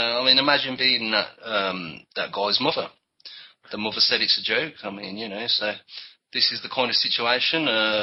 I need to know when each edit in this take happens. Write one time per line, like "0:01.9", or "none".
none